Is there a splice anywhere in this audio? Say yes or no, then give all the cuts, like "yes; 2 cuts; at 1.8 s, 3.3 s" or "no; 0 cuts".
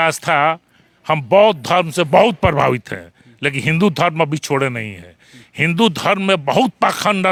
no; 0 cuts